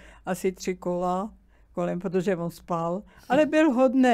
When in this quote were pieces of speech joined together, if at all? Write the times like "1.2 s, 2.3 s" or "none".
none

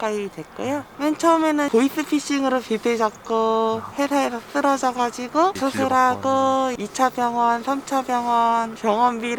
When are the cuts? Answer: 0.9 s, 1.7 s, 3.9 s

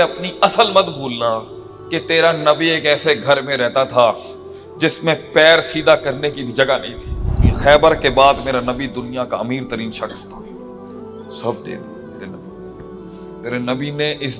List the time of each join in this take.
7.4 s

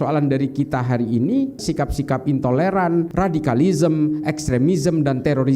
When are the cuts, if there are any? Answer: 1.6 s, 3.1 s

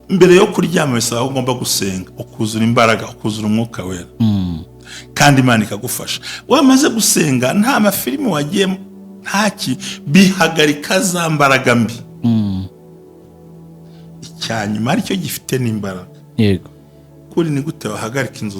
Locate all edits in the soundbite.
17.2 s

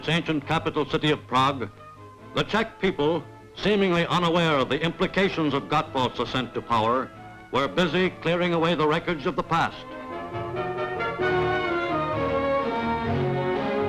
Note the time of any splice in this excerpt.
none

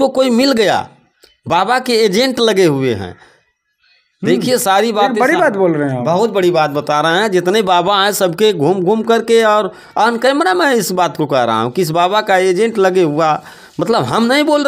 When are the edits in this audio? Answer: none

